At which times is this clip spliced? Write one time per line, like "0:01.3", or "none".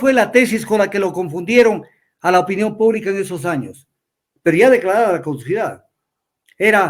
none

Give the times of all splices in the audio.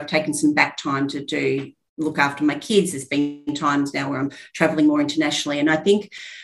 none

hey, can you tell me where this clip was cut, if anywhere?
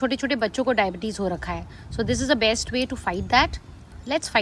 none

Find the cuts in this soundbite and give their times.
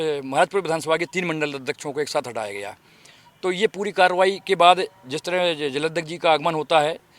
none

